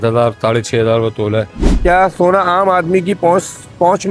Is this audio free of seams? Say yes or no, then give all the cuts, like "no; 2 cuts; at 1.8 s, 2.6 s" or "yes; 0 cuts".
no; 1 cut; at 1.5 s